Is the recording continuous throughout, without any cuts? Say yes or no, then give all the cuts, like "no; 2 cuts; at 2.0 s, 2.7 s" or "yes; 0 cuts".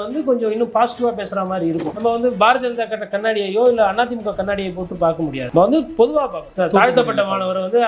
no; 3 cuts; at 1.9 s, 5.4 s, 6.5 s